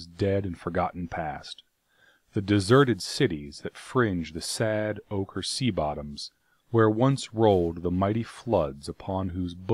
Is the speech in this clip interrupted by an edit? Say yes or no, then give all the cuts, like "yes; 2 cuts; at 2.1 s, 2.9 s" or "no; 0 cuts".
no; 0 cuts